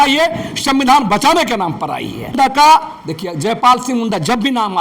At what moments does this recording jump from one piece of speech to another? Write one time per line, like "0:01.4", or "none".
0:02.3